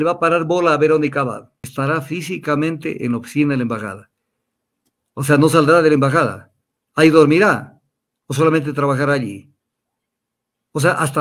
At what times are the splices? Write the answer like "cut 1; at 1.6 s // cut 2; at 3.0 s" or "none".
cut 1; at 1.6 s